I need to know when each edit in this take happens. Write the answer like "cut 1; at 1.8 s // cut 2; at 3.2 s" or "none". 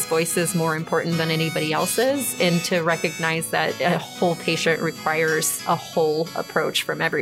cut 1; at 3.8 s // cut 2; at 5.5 s